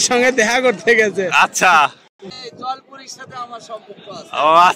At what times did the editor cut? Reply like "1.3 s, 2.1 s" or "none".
2.2 s